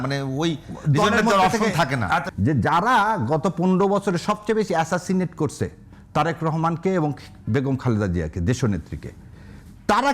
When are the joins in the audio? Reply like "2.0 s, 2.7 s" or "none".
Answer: 2.3 s